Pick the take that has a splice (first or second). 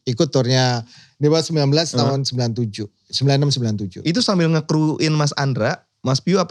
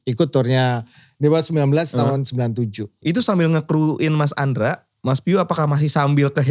second